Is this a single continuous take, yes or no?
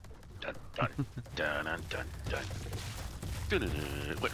yes